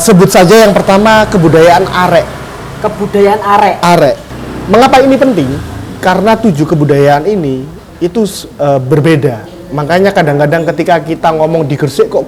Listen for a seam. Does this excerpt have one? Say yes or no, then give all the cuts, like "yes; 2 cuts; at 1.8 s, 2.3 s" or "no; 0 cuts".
yes; 1 cut; at 4.3 s